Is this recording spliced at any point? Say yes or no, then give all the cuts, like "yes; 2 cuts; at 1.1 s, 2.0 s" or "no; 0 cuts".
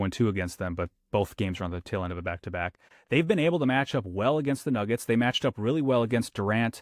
no; 0 cuts